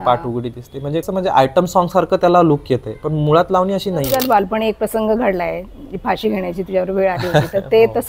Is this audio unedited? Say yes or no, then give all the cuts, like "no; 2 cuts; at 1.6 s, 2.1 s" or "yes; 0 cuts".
no; 2 cuts; at 1.1 s, 4.1 s